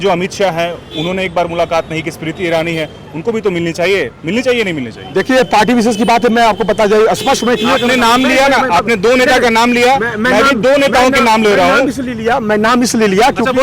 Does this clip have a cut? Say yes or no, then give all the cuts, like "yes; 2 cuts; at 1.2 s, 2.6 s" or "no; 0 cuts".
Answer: no; 0 cuts